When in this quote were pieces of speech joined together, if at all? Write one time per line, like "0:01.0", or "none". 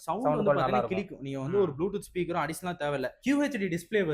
none